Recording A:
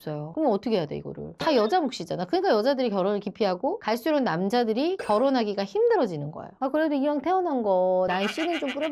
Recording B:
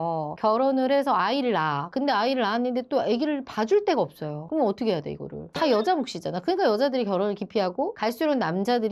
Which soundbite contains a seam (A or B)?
A